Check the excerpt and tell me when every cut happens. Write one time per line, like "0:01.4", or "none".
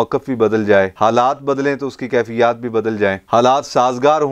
0:00.9